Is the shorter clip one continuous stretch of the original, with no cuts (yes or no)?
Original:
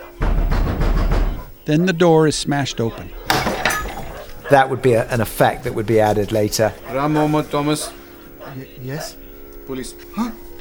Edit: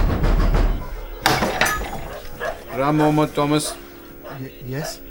no